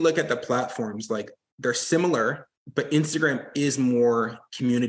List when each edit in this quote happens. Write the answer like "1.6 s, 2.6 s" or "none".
2.5 s